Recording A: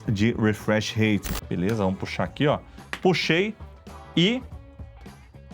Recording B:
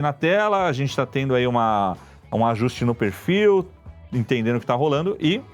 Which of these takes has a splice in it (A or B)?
A